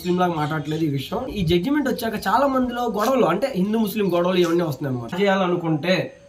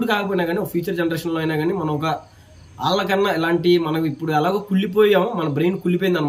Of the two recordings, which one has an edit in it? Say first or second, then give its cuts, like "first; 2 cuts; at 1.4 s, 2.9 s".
first; 2 cuts; at 1.3 s, 5.1 s